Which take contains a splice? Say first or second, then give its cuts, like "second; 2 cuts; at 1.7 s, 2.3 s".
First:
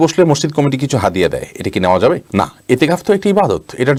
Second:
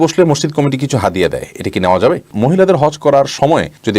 second; 1 cut; at 2.3 s